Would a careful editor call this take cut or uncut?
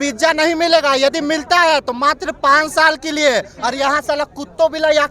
uncut